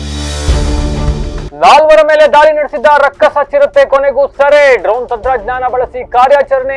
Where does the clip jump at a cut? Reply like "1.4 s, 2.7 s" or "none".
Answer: 1.4 s